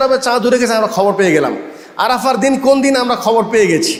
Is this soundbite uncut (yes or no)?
yes